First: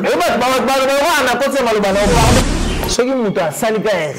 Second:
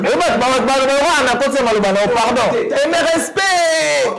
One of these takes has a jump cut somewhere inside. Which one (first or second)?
first